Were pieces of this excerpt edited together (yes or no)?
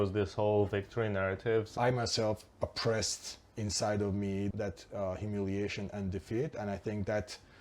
yes